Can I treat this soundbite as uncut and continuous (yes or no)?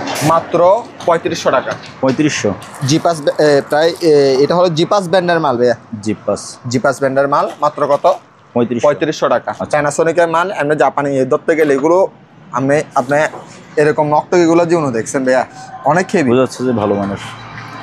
no